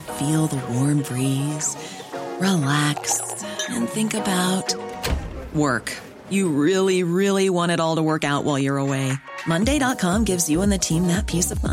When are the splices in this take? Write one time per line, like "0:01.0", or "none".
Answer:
none